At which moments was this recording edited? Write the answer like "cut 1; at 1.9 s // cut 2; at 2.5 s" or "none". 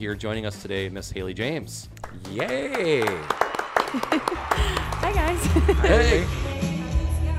cut 1; at 6.3 s